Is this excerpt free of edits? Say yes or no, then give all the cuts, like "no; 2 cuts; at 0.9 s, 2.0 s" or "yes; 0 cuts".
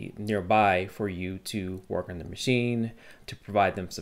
yes; 0 cuts